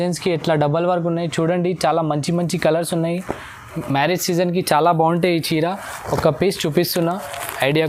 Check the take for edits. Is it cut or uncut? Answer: uncut